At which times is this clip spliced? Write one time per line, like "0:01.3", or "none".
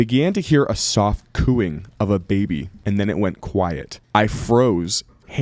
0:02.7
0:03.9